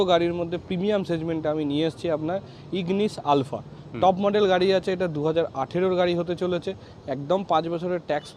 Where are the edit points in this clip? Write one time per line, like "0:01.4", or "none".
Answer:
none